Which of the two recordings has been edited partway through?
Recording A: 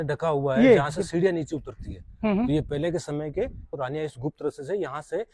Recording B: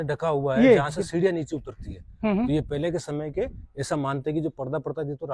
A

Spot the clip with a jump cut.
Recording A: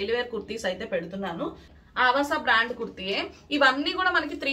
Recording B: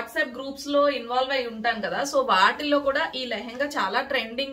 A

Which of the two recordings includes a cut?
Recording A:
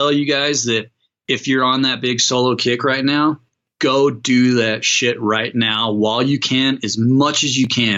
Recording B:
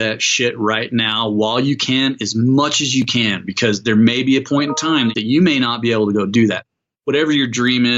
B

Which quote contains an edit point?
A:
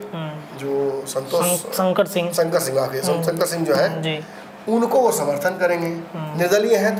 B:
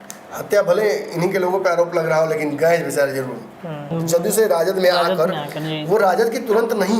B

